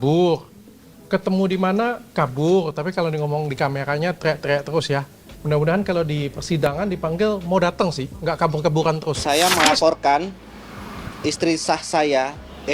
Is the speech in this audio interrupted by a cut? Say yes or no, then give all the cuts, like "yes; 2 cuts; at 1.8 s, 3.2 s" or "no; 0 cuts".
yes; 1 cut; at 9.1 s